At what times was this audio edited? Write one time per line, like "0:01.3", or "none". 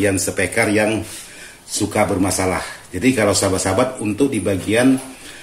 none